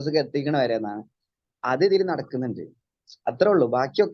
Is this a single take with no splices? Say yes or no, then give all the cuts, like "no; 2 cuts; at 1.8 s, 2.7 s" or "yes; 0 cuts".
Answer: yes; 0 cuts